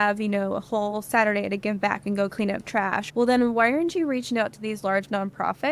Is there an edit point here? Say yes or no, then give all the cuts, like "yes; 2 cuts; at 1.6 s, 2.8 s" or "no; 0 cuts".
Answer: yes; 1 cut; at 3.0 s